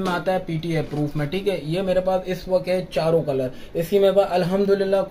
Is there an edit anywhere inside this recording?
no; 0 cuts

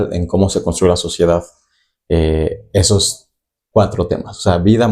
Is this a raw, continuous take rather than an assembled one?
yes; 0 cuts

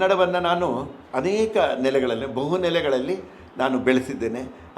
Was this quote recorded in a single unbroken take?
no; 1 cut; at 1.0 s

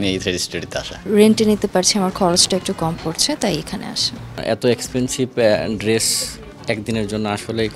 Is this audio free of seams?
no; 2 cuts; at 1.0 s, 4.4 s

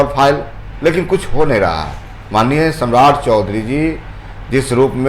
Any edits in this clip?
no; 0 cuts

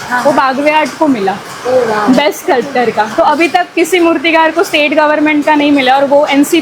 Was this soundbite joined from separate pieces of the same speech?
no; 0 cuts

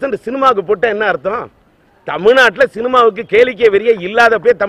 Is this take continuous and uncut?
yes; 0 cuts

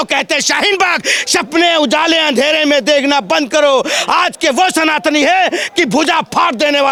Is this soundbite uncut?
yes; 0 cuts

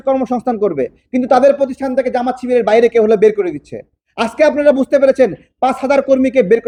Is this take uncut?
yes; 0 cuts

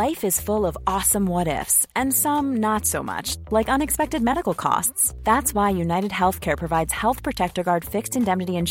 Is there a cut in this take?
no; 0 cuts

